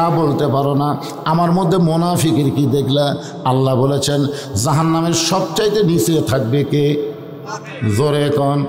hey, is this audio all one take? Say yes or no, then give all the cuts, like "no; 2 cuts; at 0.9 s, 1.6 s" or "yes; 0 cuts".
yes; 0 cuts